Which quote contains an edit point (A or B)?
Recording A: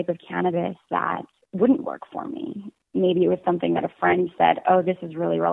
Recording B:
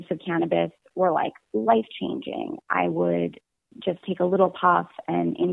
A